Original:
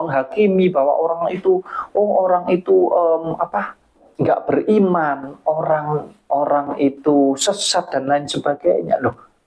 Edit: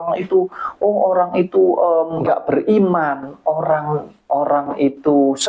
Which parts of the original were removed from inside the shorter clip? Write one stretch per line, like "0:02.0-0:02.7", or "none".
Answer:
0:03.3-0:04.2